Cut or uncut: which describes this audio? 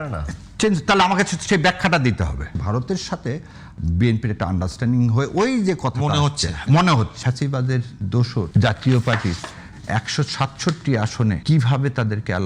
cut